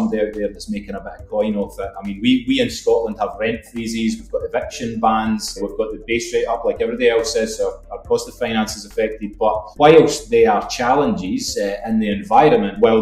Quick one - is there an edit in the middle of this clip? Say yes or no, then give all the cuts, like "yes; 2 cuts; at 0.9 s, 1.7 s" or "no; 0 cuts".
no; 0 cuts